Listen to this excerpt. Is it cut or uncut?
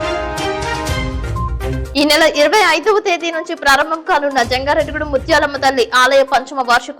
cut